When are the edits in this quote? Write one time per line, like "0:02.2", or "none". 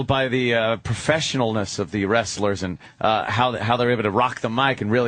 0:02.4